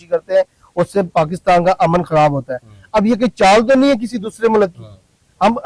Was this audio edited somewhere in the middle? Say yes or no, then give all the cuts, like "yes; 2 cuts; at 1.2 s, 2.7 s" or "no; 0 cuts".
no; 0 cuts